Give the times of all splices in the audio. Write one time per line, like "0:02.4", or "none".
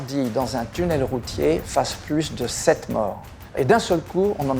0:03.6